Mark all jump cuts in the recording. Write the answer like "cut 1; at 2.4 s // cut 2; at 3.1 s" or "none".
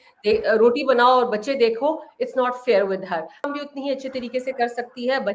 cut 1; at 3.5 s